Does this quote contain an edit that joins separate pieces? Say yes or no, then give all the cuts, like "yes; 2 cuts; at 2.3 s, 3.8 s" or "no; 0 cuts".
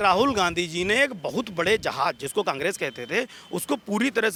no; 0 cuts